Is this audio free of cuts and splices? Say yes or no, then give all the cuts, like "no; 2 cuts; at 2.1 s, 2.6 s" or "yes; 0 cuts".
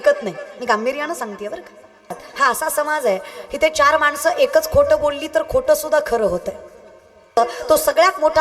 no; 2 cuts; at 2.2 s, 7.4 s